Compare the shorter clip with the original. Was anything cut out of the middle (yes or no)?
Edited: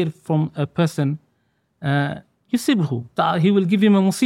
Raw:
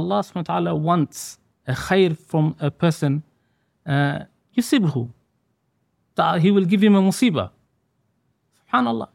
yes